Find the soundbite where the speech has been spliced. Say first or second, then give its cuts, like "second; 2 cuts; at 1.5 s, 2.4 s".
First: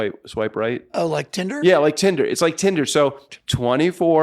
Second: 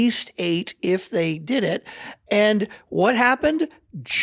first; 1 cut; at 3.3 s